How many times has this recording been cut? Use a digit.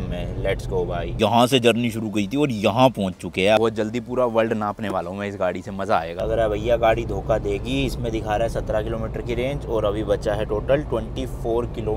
2